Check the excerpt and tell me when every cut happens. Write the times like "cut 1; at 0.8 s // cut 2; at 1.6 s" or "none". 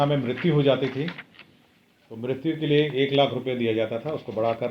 none